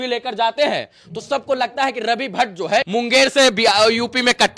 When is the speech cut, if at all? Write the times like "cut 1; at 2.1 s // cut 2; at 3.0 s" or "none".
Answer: cut 1; at 2.9 s